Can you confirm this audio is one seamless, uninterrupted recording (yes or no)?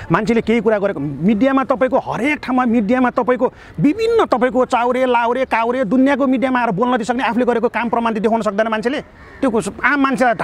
yes